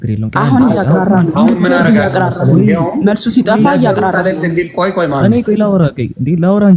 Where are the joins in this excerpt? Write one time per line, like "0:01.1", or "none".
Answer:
none